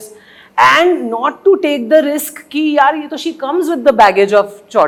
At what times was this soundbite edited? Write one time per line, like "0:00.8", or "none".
none